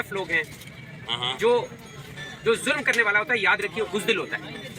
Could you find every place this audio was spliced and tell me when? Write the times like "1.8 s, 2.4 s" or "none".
none